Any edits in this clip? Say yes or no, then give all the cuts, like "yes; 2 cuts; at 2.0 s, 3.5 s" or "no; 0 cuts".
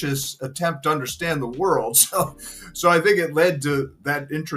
no; 0 cuts